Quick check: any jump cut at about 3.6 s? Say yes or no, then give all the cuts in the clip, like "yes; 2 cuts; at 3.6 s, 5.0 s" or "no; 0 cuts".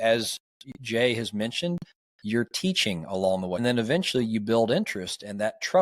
yes; 1 cut; at 3.6 s